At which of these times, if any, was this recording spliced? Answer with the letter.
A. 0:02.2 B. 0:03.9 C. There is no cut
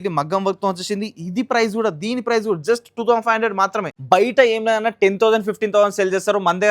B